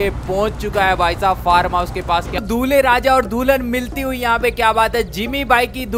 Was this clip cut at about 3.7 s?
no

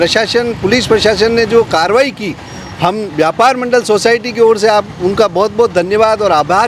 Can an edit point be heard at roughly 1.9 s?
no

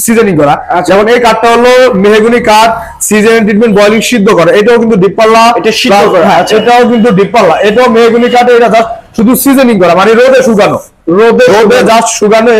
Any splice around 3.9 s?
no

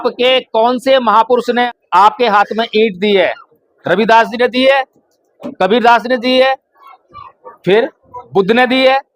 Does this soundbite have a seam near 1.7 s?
yes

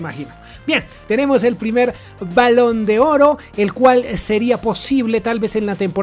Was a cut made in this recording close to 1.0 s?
yes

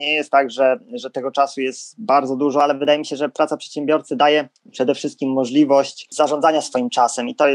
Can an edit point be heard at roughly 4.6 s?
yes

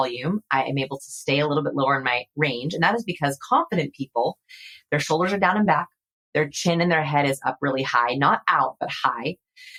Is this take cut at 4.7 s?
no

